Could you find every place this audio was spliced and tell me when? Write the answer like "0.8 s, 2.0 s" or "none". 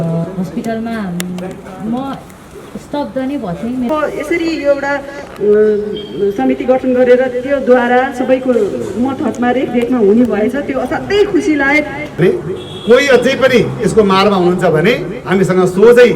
3.9 s, 12.2 s